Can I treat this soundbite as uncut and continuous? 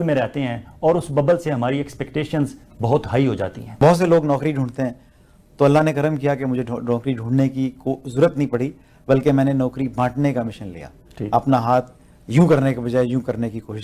no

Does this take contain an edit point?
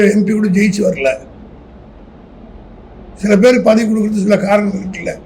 no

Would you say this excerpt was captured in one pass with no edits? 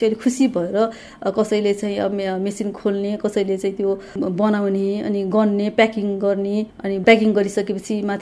yes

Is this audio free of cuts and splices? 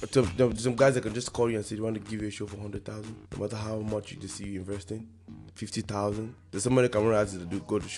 no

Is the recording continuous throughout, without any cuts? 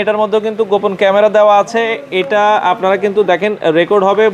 yes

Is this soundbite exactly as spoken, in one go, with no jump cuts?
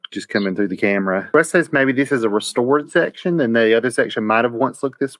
no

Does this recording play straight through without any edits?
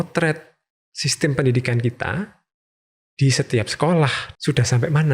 no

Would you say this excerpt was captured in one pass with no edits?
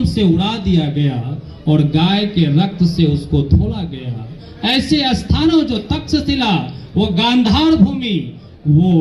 yes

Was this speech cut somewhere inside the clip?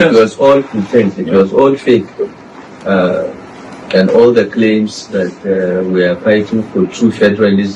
no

